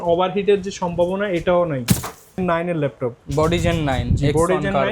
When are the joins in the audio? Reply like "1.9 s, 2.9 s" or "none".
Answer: 2.4 s